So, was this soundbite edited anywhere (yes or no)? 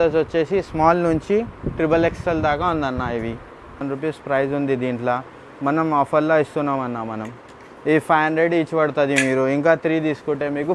yes